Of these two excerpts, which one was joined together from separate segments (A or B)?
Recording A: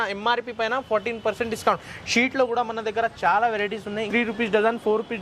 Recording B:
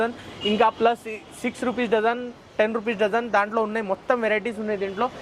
A